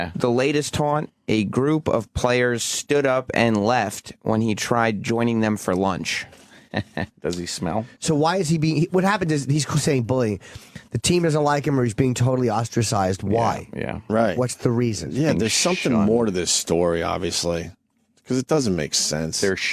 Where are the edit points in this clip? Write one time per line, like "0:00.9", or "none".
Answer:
0:05.3